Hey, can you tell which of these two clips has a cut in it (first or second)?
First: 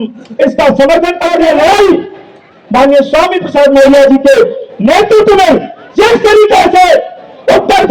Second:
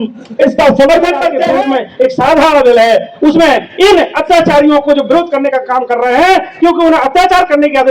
second